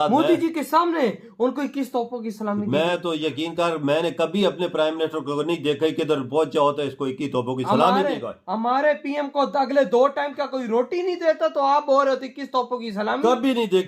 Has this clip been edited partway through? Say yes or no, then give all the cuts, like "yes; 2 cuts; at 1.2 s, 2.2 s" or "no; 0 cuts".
no; 0 cuts